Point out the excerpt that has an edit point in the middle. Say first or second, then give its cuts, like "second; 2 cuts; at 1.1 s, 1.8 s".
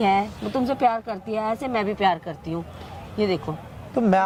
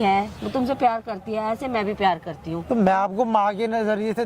second; 1 cut; at 2.6 s